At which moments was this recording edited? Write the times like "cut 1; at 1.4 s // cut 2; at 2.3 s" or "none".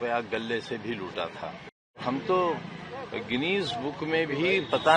cut 1; at 2.0 s